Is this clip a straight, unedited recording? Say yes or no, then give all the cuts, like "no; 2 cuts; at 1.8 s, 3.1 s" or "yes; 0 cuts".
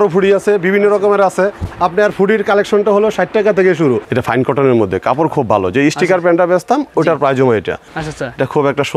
no; 2 cuts; at 4.1 s, 7.9 s